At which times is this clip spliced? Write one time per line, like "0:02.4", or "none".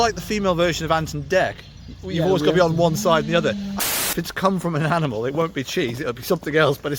0:03.7

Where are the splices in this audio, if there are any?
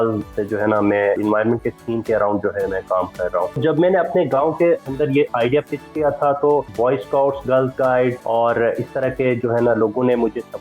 0:01.2
0:03.6
0:06.7
0:08.2

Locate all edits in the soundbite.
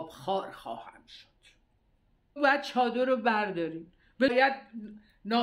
0:02.4
0:04.3

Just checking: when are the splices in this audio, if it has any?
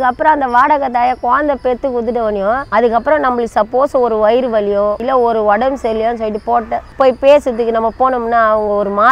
0:02.6
0:05.0
0:06.8

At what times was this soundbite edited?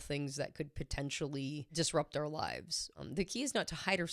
0:01.7
0:02.8

